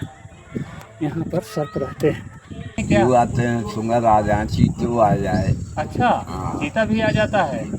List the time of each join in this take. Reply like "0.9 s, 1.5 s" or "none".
2.8 s